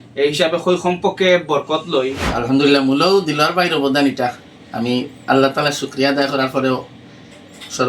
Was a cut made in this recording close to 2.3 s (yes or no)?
yes